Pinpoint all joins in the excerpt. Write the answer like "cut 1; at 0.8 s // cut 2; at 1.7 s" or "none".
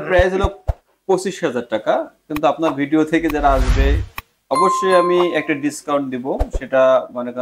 none